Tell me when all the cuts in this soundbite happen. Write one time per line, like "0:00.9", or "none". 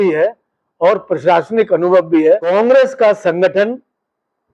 0:02.5